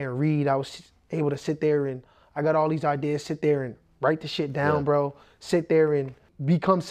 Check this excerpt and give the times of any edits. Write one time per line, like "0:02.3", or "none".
none